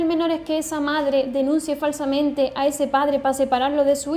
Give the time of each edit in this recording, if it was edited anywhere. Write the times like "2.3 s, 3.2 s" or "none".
none